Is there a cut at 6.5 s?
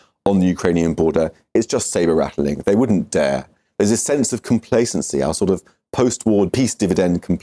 yes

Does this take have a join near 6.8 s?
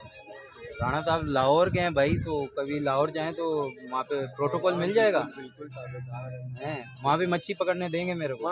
no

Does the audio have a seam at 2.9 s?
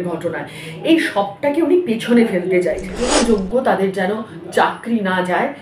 yes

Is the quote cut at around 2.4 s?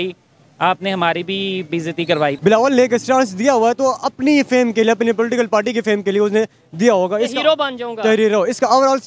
yes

